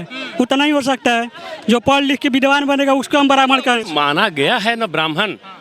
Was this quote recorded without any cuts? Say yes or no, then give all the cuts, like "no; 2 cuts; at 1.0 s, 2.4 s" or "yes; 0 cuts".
no; 1 cut; at 3.9 s